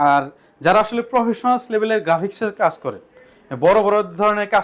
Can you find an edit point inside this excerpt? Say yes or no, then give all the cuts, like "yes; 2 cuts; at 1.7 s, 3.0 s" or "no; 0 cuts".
no; 0 cuts